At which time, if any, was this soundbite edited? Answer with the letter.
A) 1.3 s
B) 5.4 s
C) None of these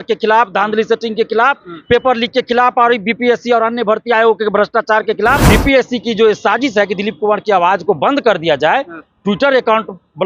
B